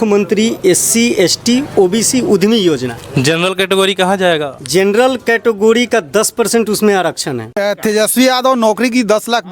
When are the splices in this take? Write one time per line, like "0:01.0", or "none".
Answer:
0:07.6